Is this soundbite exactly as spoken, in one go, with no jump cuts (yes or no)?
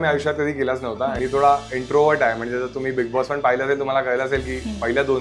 no